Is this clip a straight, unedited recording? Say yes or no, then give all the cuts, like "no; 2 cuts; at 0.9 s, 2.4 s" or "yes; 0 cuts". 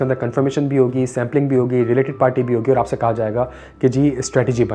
yes; 0 cuts